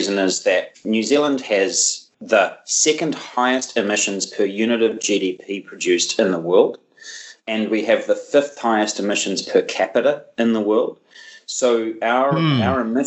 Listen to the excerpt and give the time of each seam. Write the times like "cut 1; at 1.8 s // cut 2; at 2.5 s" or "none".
none